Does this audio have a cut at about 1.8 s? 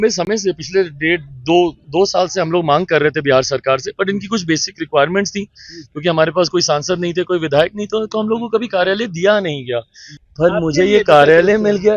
no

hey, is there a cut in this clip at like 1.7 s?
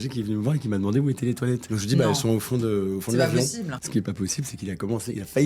yes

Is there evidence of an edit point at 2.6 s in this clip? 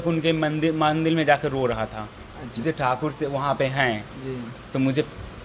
yes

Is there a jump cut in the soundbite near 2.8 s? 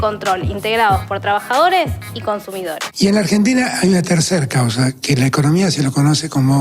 yes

